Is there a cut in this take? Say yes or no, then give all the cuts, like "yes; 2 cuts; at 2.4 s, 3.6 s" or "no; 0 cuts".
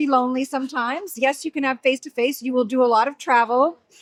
no; 0 cuts